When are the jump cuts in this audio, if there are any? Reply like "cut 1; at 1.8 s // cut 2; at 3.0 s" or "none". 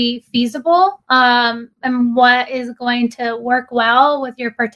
none